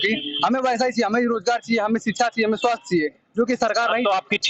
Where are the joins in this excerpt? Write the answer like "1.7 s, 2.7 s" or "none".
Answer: none